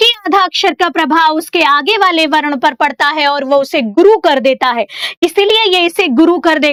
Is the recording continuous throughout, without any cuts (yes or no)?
yes